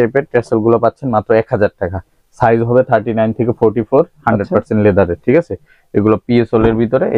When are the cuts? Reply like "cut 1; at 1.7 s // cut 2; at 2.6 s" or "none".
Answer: none